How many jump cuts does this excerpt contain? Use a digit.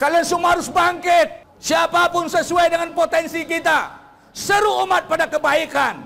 1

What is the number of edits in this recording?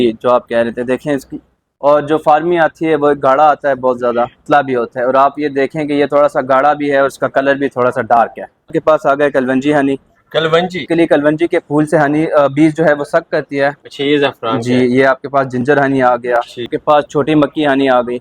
5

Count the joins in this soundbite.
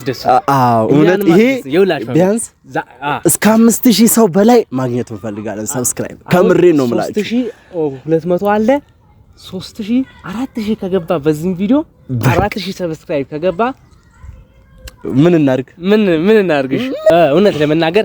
1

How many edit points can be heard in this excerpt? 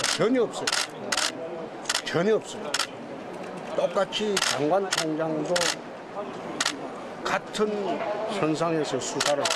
1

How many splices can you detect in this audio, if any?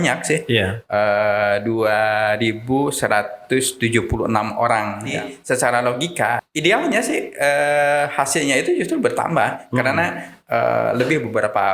2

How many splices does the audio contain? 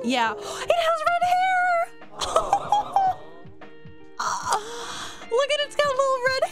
0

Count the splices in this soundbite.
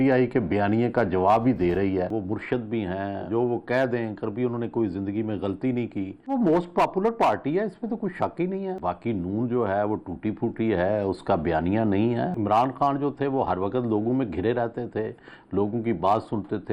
4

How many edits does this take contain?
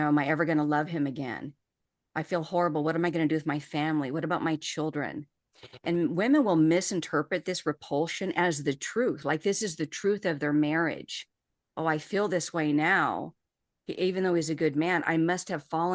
0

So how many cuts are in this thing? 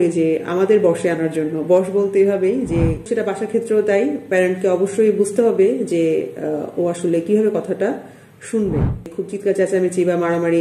2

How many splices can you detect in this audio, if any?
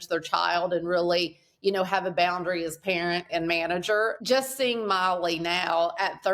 1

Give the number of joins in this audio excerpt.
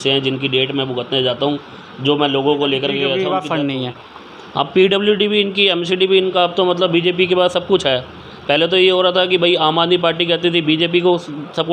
1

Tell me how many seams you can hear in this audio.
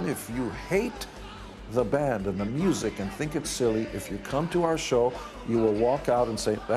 0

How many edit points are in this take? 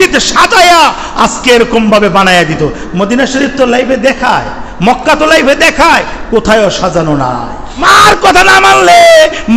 1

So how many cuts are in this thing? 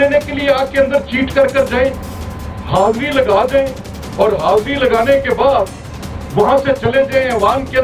0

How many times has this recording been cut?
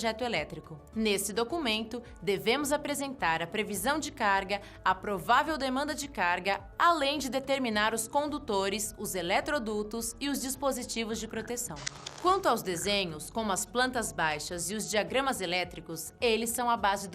3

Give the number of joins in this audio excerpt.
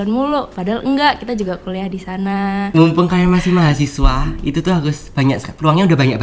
1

